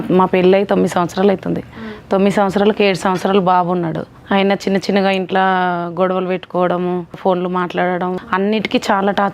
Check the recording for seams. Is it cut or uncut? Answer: cut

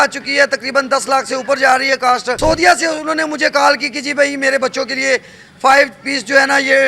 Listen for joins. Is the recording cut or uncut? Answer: cut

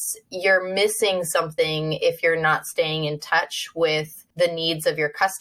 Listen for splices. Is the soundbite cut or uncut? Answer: cut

